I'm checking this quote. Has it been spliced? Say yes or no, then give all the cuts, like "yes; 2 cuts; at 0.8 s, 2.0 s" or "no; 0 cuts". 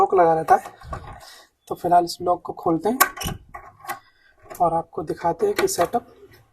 no; 0 cuts